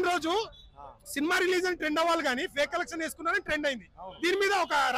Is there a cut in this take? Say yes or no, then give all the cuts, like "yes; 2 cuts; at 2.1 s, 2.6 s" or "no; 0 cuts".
no; 0 cuts